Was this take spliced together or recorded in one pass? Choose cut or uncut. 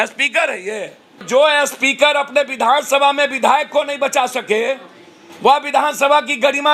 cut